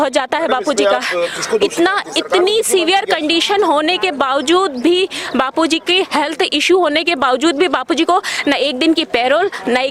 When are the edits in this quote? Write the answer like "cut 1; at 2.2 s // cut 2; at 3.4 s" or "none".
none